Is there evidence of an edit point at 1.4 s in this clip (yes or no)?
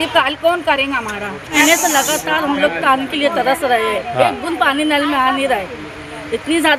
no